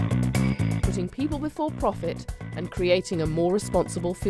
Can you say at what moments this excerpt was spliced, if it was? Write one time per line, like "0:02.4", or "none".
0:01.5